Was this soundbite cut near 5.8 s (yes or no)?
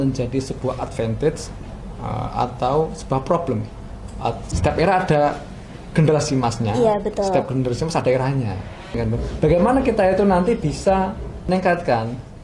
no